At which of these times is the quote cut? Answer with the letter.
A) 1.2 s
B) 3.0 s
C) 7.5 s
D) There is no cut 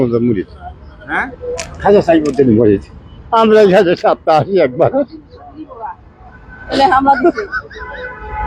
D